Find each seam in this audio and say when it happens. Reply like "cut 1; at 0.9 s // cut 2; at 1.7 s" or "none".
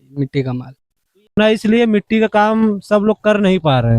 cut 1; at 1.4 s